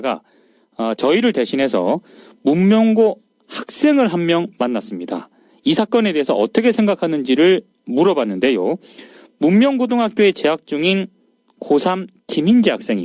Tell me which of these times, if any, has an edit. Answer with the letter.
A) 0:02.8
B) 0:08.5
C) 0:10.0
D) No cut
C